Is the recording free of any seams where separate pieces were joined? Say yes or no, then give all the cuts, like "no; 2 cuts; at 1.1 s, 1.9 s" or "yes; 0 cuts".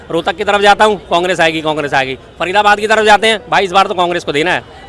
yes; 0 cuts